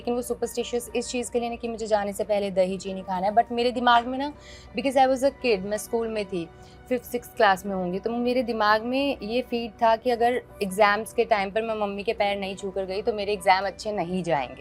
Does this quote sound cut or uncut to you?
uncut